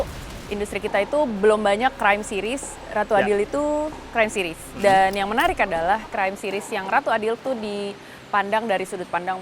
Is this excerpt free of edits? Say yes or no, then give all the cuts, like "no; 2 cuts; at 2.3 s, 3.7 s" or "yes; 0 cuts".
no; 1 cut; at 7.4 s